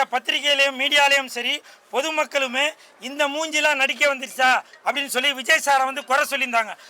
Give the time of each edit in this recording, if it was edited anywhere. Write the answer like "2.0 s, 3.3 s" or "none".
none